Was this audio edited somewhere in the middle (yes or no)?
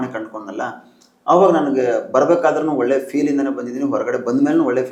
no